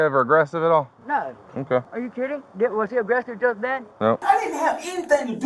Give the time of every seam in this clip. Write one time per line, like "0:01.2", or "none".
0:01.9
0:04.2